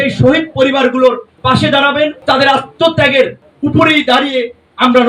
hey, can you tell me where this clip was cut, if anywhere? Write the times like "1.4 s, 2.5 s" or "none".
2.2 s